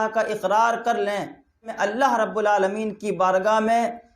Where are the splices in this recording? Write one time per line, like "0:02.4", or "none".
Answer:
0:01.7